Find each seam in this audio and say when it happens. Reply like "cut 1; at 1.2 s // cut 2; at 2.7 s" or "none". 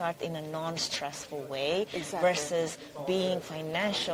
none